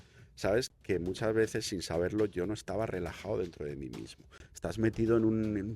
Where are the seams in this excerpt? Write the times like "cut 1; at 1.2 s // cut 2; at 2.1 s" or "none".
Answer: cut 1; at 4.4 s